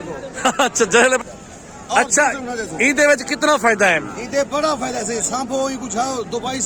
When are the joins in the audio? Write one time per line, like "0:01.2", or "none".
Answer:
0:01.2